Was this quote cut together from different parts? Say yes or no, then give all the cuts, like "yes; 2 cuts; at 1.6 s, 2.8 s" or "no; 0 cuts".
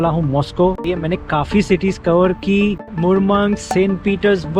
yes; 1 cut; at 1.0 s